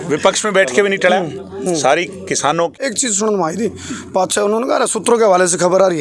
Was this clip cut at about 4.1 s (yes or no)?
no